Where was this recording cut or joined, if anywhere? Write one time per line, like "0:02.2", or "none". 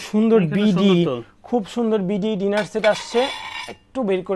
none